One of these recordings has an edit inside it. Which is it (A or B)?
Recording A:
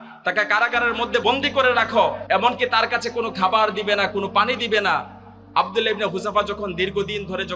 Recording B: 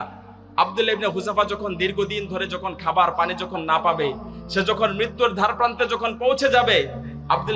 A